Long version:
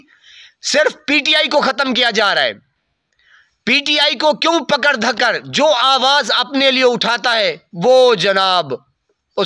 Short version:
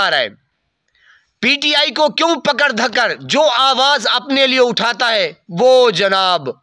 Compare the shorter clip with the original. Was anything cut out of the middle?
no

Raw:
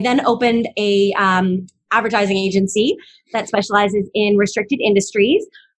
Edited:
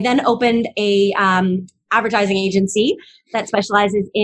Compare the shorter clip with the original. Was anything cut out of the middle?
no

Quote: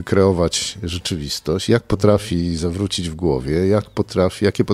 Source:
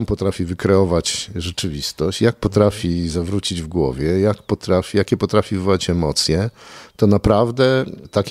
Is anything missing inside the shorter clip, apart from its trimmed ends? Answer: no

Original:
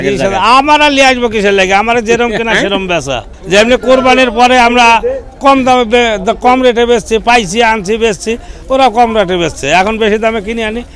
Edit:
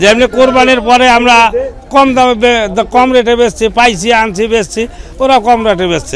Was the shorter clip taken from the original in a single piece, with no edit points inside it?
yes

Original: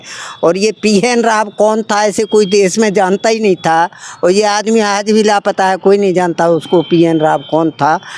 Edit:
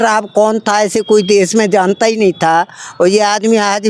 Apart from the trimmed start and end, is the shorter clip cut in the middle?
no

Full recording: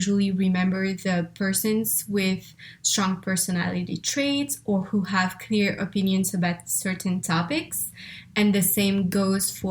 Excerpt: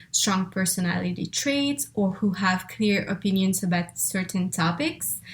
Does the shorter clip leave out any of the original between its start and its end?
no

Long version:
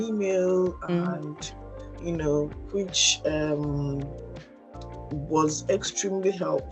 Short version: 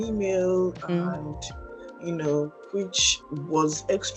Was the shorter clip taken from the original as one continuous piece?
no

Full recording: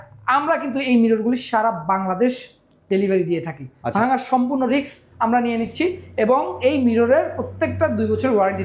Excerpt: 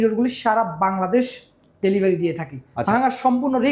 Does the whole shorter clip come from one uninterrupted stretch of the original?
yes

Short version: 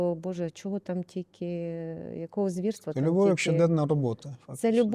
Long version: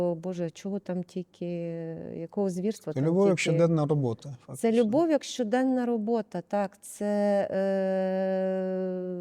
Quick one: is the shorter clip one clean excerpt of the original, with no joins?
yes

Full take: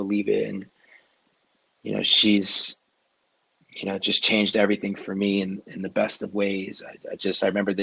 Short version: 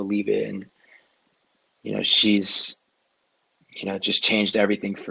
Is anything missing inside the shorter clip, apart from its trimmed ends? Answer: no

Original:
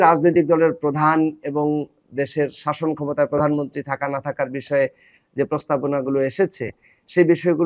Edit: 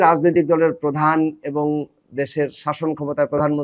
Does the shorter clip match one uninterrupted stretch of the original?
yes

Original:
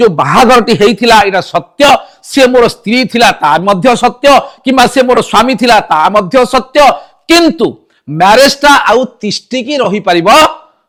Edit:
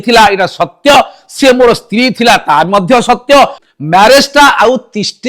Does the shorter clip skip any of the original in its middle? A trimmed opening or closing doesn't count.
yes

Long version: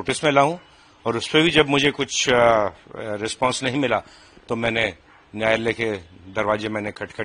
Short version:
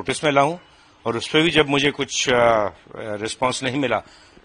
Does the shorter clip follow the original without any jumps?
yes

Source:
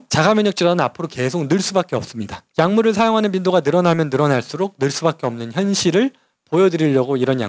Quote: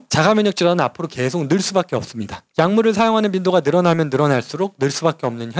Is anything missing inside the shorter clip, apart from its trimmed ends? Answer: no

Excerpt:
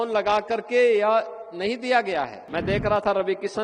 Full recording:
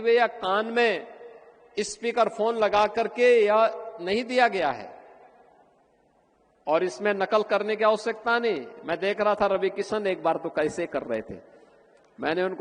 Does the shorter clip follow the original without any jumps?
no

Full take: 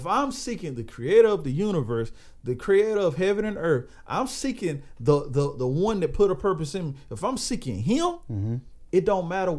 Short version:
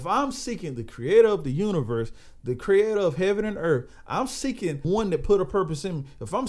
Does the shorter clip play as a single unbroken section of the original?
no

